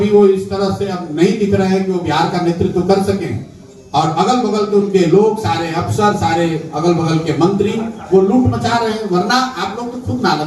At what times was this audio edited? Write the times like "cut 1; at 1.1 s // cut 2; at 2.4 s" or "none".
none